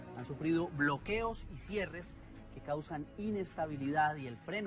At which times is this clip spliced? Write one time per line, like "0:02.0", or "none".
none

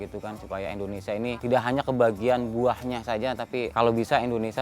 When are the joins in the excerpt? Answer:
0:01.4
0:03.7

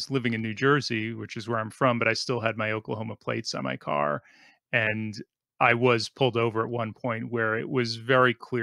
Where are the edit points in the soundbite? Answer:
none

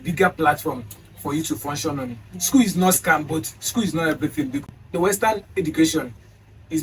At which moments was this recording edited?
0:04.6

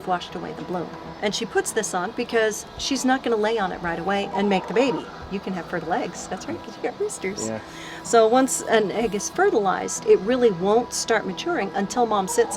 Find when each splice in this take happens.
0:01.1
0:05.1

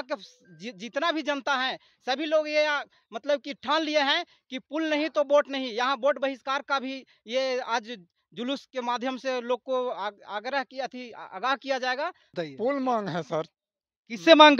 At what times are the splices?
0:12.4

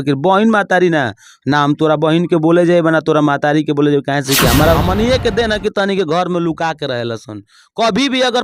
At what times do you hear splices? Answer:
0:04.8

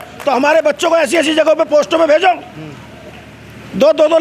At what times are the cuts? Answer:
none

